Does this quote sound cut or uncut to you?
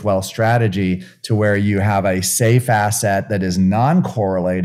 uncut